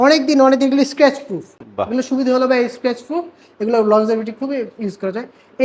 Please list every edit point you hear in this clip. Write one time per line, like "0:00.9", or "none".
none